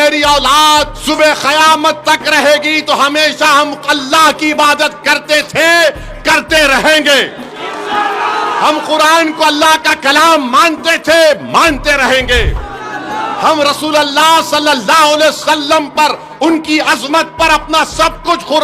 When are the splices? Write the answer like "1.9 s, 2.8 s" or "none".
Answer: 1.0 s